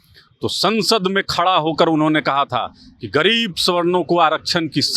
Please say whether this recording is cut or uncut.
uncut